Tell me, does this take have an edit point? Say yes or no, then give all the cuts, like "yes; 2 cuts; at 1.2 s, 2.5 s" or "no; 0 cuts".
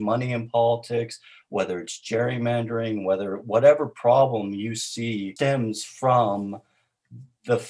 yes; 1 cut; at 5.3 s